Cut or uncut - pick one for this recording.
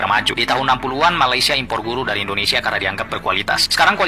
uncut